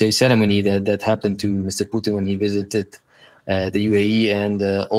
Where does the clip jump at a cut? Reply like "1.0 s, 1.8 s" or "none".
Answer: none